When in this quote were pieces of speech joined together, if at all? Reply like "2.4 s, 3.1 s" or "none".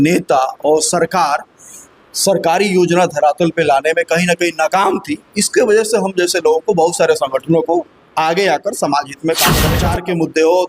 9.7 s